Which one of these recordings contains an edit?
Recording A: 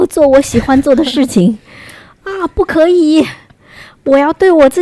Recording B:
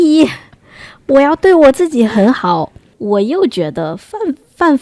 B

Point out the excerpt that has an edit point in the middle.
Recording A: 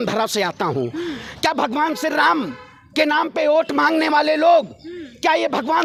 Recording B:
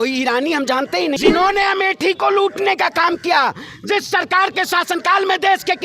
B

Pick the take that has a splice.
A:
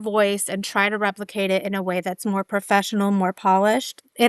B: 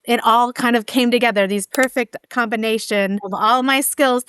B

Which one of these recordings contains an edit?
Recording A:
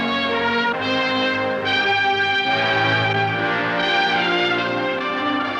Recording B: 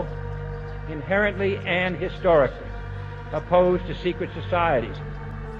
A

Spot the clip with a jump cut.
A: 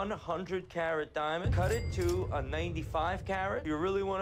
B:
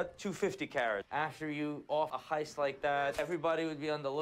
B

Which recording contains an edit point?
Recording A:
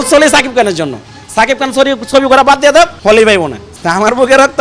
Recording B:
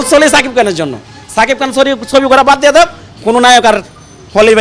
A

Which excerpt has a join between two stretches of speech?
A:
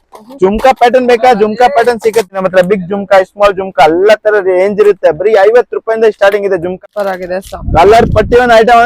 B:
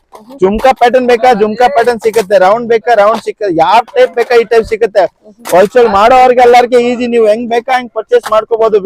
A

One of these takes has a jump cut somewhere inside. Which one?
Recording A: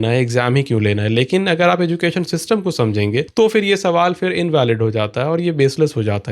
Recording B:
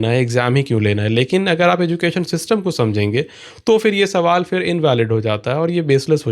A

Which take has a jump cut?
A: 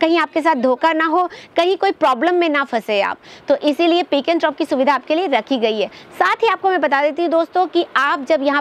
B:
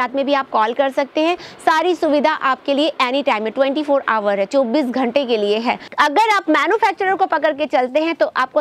B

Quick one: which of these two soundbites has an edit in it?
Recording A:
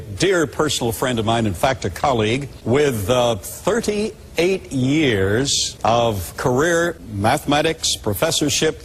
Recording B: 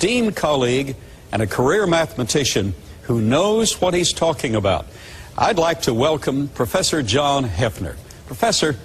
A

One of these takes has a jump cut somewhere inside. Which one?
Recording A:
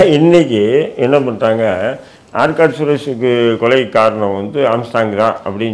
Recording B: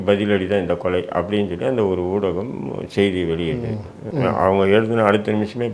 B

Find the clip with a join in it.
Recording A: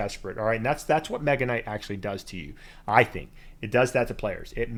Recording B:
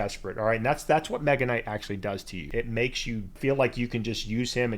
B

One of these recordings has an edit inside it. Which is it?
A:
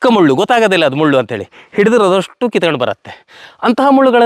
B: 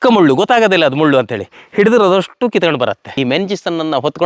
B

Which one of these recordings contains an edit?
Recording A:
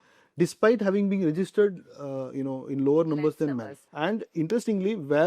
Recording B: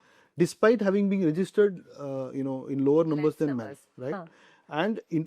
A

